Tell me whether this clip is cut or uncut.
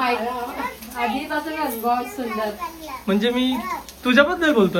uncut